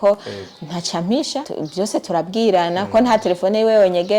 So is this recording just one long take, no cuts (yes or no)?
no